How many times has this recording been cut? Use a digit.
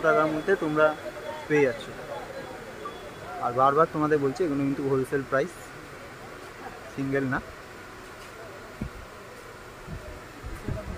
0